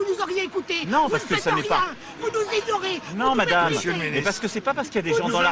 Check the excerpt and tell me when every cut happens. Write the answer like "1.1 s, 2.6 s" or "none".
1.4 s, 4.0 s